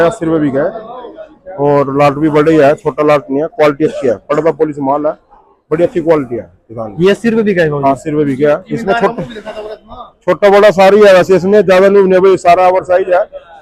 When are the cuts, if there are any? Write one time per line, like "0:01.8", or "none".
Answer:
none